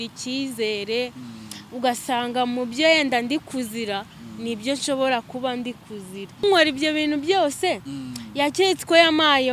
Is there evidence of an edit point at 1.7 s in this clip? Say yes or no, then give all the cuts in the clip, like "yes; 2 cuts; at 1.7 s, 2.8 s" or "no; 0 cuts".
no; 1 cut; at 6.4 s